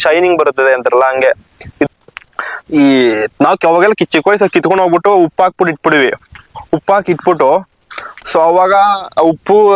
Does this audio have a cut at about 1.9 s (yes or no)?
yes